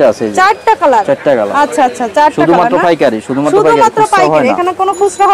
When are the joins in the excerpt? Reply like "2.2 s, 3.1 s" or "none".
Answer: none

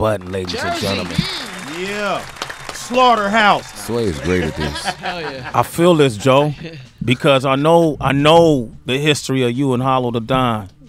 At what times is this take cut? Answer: 4.7 s

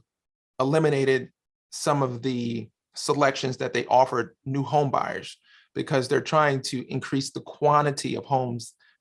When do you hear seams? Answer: none

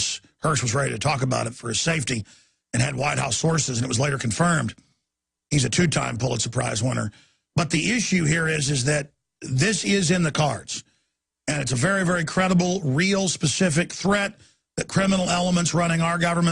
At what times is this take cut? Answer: 10.6 s

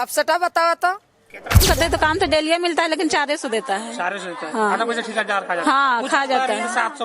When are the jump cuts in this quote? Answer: 1.6 s

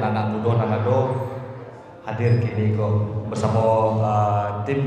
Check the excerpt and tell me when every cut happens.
none

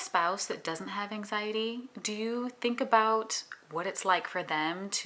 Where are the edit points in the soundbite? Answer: none

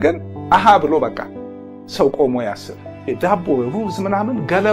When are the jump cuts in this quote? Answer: 3.1 s

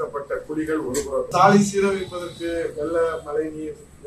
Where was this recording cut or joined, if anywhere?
1.3 s

